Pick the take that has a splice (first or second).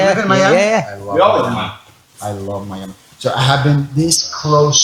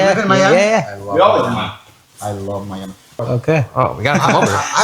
second